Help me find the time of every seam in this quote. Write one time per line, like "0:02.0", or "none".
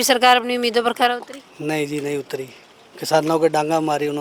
none